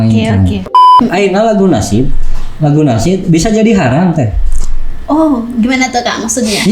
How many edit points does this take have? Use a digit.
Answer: 1